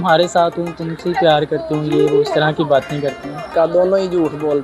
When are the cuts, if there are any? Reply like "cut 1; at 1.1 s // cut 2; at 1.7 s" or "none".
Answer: cut 1; at 3.5 s